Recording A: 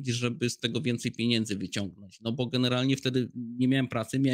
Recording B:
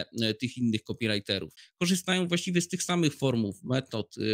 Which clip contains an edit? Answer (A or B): B